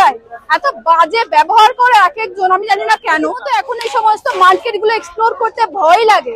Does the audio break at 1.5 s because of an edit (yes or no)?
no